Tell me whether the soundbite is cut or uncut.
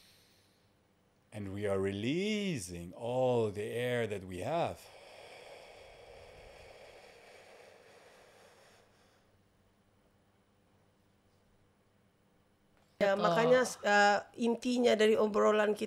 cut